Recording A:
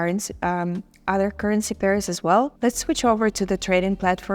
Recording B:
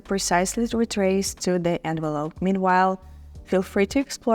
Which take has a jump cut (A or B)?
A